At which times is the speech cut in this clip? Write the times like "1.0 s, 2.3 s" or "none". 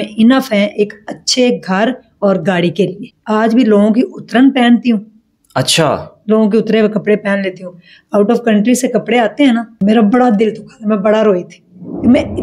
3.0 s, 9.8 s